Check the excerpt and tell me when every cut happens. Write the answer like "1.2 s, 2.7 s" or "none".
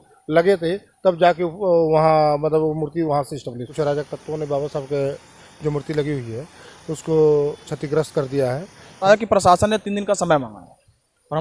3.6 s, 9.0 s